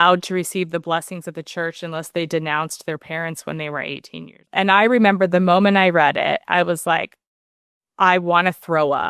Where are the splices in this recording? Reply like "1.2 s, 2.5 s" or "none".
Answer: 4.4 s